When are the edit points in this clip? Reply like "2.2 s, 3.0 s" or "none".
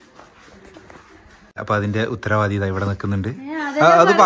none